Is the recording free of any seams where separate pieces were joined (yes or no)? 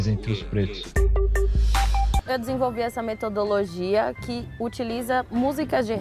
no